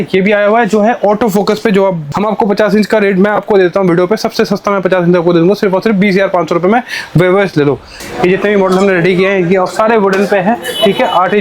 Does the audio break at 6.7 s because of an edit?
no; 2 cuts; at 2.0 s, 8.0 s

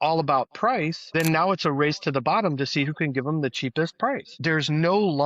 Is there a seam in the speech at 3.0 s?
no; 2 cuts; at 1.0 s, 4.3 s

